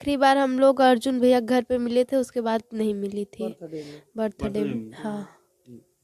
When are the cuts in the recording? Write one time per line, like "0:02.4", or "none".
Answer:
none